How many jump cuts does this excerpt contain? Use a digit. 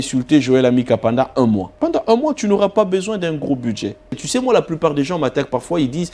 2